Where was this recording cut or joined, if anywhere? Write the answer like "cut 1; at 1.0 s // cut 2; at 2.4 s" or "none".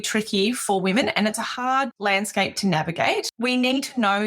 cut 1; at 1.9 s // cut 2; at 3.3 s